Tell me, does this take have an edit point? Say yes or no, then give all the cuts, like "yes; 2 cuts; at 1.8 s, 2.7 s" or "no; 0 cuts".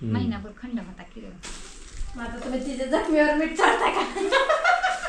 yes; 1 cut; at 1.4 s